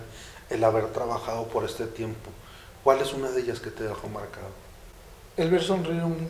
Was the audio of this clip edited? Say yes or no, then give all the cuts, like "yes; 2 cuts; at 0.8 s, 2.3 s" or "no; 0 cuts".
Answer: no; 0 cuts